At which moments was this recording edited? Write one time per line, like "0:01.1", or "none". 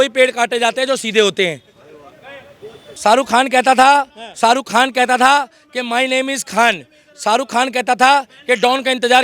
0:02.8